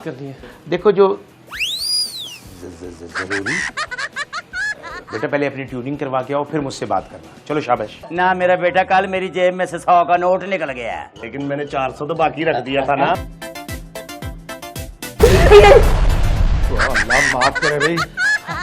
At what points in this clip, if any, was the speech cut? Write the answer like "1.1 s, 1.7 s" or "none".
8.0 s, 13.3 s